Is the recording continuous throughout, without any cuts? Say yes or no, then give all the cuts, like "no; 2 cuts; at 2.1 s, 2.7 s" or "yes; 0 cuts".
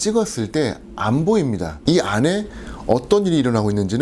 no; 1 cut; at 1.8 s